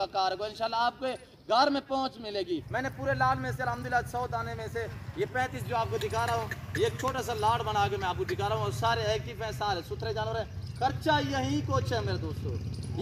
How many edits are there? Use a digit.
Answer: 1